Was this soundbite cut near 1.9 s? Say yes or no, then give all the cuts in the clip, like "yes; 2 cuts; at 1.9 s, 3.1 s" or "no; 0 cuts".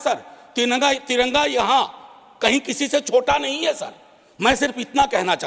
no; 0 cuts